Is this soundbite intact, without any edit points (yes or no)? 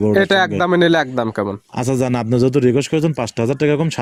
yes